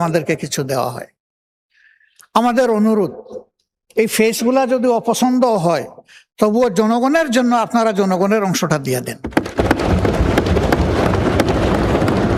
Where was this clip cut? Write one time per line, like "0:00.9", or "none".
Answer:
none